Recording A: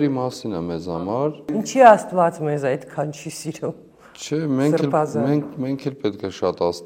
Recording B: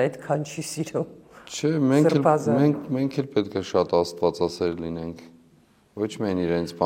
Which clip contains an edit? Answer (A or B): A